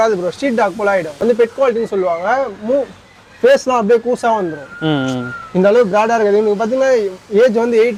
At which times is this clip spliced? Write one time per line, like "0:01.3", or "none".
none